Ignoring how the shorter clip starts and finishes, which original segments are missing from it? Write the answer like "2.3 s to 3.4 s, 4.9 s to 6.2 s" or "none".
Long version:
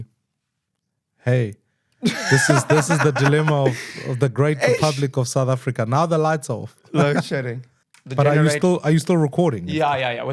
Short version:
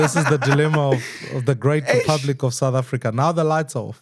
none